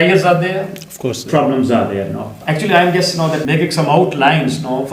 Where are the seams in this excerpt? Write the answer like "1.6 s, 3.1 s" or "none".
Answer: 2.4 s, 3.4 s